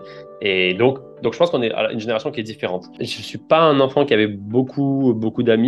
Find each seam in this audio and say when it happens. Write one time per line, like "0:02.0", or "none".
none